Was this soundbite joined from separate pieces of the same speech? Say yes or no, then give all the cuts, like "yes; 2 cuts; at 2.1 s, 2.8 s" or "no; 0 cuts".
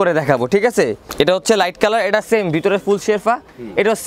yes; 1 cut; at 1.0 s